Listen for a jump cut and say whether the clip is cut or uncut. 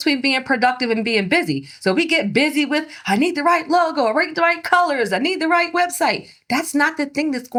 uncut